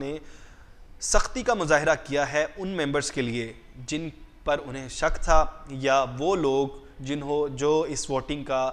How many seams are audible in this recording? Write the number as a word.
zero